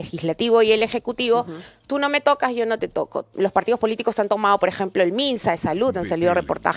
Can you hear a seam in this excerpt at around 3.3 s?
yes; 1 cut; at 3.3 s

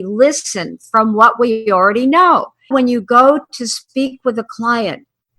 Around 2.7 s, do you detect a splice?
yes; 1 cut; at 2.7 s

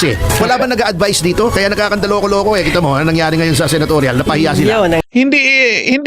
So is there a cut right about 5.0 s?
yes; 1 cut; at 5.0 s

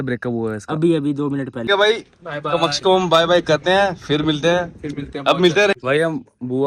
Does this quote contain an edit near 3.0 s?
no; 2 cuts; at 1.6 s, 5.7 s

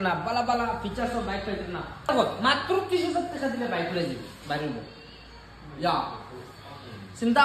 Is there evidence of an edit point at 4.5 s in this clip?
no; 1 cut; at 2.1 s

